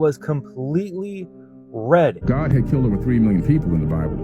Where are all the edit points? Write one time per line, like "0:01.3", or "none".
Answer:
0:02.2